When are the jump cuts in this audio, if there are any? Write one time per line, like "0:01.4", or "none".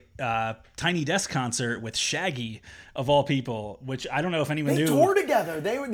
none